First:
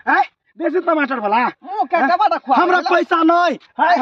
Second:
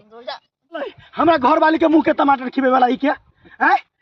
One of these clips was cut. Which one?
second; 1 cut; at 1.0 s

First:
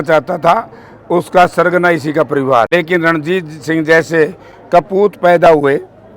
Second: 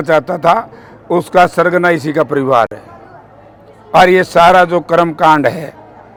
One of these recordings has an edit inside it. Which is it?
first; 1 cut; at 2.7 s

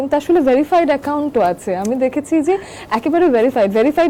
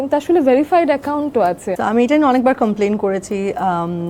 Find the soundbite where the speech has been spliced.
second; 1 cut; at 1.7 s

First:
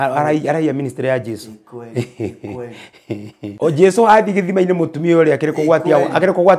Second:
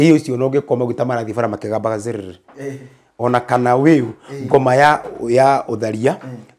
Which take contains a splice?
first; 1 cut; at 3.4 s

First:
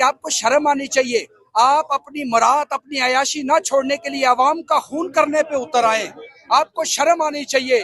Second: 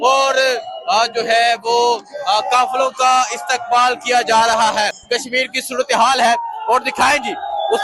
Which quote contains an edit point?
second; 1 cut; at 5.0 s

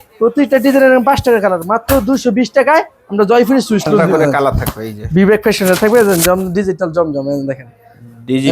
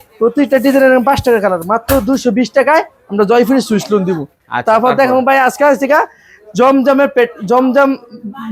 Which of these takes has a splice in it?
first; 1 cut; at 4.0 s

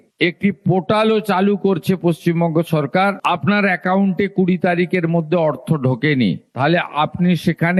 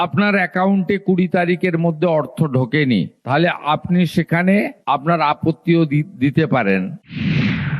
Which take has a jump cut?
second; 1 cut; at 6.9 s

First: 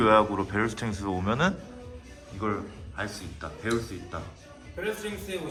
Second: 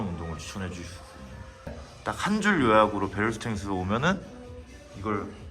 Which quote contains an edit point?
second; 1 cut; at 1.6 s

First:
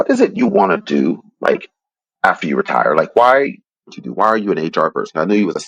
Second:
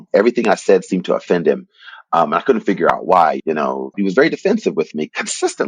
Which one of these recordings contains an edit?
second; 1 cut; at 3.9 s

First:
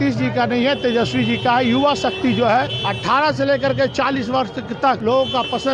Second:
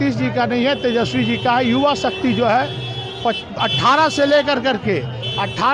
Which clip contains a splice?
first; 2 cuts; at 2.8 s, 5.0 s

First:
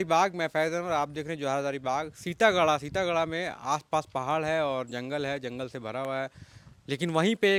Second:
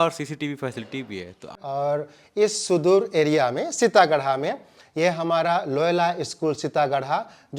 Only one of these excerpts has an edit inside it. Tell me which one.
second; 1 cut; at 1.6 s

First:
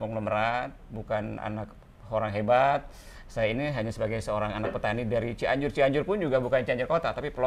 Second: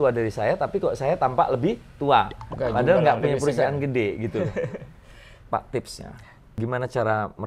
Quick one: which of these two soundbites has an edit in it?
second; 1 cut; at 6.5 s

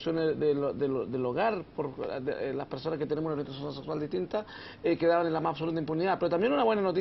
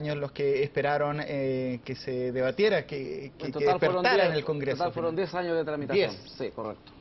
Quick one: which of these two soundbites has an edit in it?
second; 1 cut; at 1.3 s

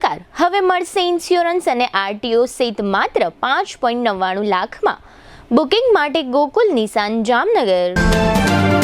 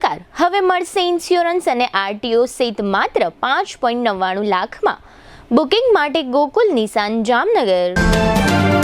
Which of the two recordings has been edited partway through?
second; 1 cut; at 7.9 s

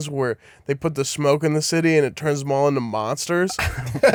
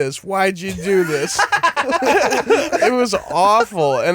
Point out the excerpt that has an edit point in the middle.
second; 1 cut; at 2.7 s

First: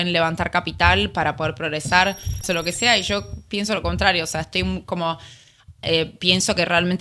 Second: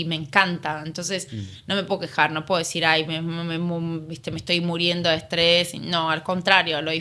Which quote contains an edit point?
first; 1 cut; at 2.4 s

